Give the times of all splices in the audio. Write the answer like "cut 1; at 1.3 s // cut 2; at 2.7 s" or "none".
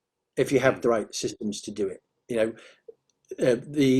none